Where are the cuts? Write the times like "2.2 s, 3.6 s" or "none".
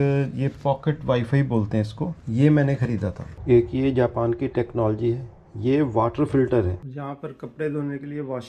3.3 s, 6.7 s